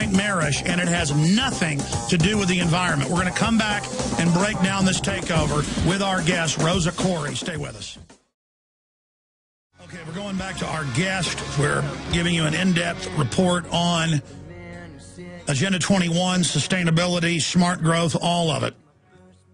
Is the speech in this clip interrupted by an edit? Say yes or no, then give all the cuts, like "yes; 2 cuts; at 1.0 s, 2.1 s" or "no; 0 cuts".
yes; 1 cut; at 14.3 s